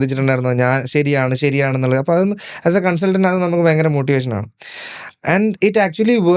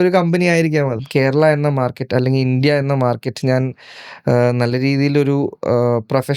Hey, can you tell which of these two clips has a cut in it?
second; 1 cut; at 1.0 s

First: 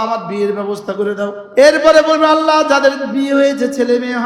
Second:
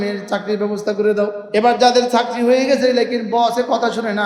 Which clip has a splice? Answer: second; 1 cut; at 1.4 s

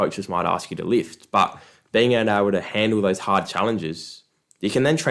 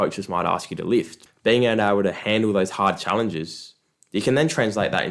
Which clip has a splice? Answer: second; 1 cut; at 1.2 s

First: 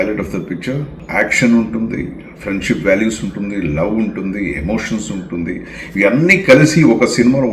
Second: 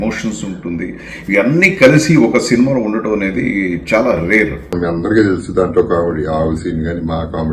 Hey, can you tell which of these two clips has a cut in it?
second; 1 cut; at 4.7 s

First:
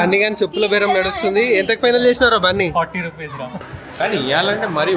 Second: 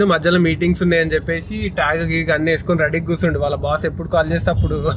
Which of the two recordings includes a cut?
first; 1 cut; at 3.5 s

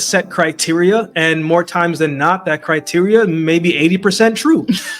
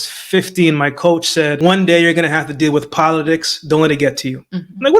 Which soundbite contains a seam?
second; 1 cut; at 1.6 s

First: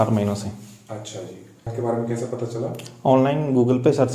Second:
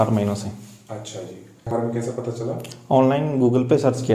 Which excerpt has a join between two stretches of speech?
second; 1 cut; at 1.7 s

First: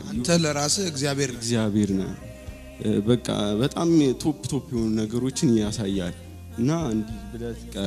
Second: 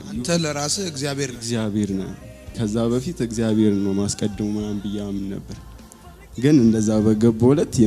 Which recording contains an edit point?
second; 1 cut; at 2.5 s

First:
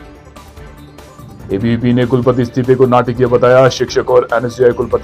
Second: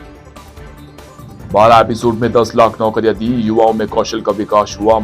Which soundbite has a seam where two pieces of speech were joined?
second; 1 cut; at 0.9 s

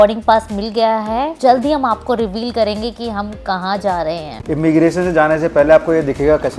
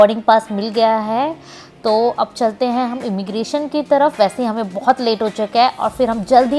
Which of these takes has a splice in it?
first; 2 cuts; at 1.3 s, 4.3 s

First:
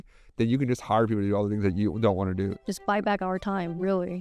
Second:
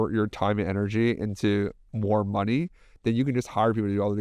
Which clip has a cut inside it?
first; 1 cut; at 2.6 s

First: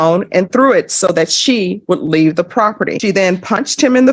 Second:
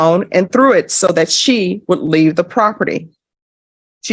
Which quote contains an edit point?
first; 1 cut; at 3.0 s

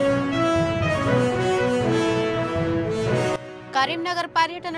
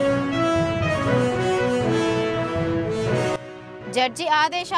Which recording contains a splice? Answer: second; 1 cut; at 3.4 s

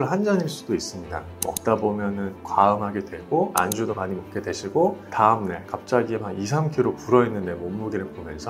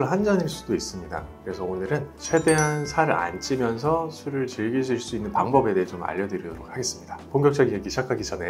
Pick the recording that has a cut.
first; 1 cut; at 1.3 s

